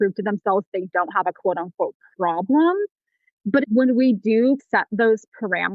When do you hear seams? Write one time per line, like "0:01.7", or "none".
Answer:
0:03.6
0:04.6

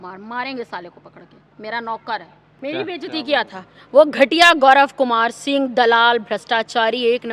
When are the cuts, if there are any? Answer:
0:02.4

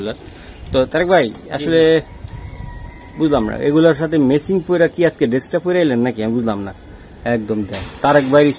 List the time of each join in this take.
none

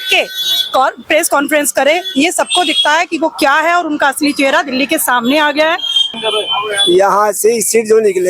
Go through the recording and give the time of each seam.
0:06.1

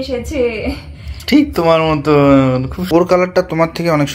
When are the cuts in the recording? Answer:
0:02.7

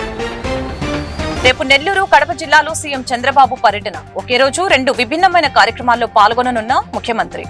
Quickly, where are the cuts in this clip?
0:01.3

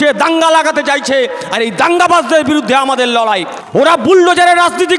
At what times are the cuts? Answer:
0:03.6

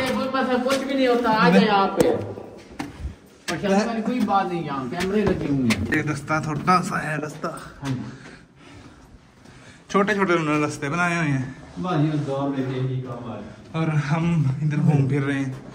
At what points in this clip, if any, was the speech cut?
none

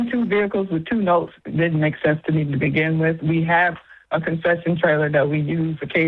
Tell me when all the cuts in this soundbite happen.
none

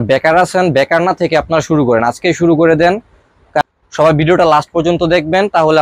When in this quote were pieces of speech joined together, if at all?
0:03.6

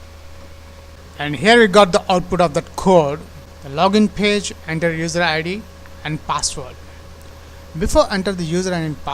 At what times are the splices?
0:01.0

